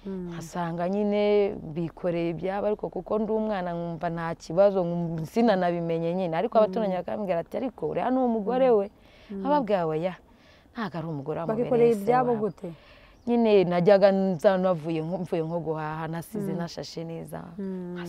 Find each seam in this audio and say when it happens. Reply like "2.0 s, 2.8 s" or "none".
none

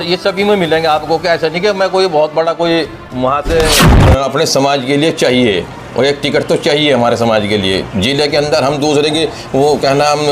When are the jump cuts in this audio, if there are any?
3.9 s

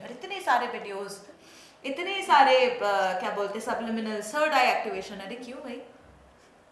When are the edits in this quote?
none

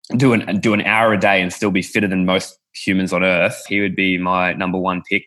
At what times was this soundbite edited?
3.7 s

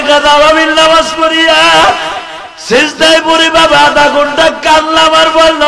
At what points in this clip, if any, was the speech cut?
none

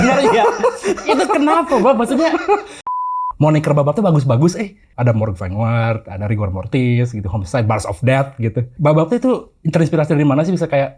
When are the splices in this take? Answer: 2.8 s, 4.8 s, 8.7 s

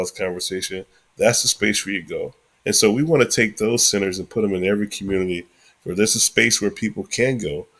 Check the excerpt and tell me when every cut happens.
none

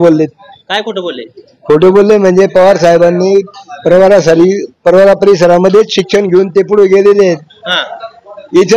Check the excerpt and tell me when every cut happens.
none

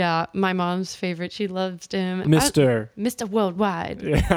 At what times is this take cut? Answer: 2.2 s

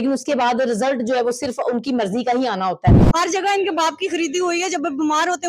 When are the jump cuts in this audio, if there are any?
3.0 s

